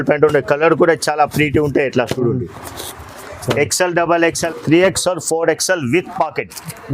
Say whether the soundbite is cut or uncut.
cut